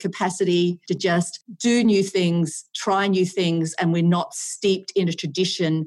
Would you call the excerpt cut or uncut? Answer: cut